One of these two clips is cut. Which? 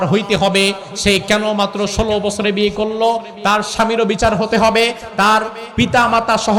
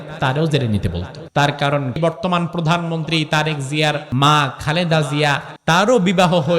second; 4 cuts; at 1.1 s, 2.0 s, 4.1 s, 5.5 s

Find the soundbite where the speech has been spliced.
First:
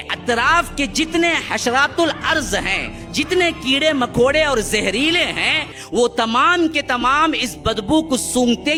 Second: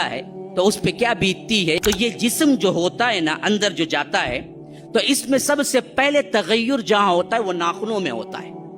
second; 1 cut; at 1.8 s

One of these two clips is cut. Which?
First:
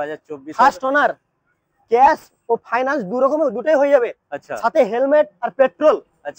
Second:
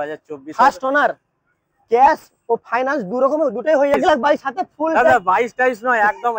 second; 1 cut; at 3.9 s

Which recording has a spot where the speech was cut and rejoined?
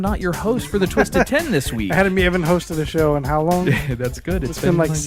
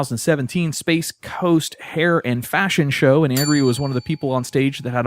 second; 1 cut; at 2.2 s

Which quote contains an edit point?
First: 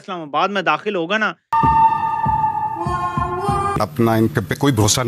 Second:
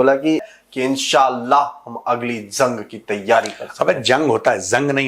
first; 1 cut; at 1.5 s

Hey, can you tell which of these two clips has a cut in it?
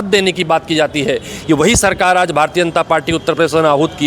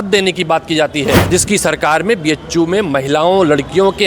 second; 1 cut; at 1.2 s

